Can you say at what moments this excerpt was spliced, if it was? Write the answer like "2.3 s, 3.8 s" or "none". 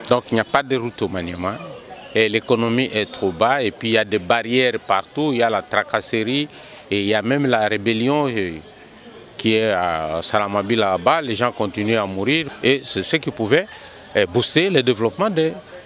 12.5 s